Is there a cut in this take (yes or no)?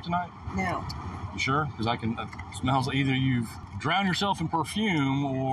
yes